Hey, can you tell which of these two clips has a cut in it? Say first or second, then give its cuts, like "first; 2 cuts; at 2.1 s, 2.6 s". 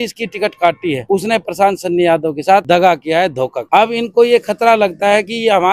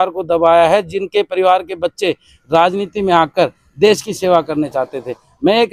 first; 3 cuts; at 1.0 s, 2.6 s, 3.6 s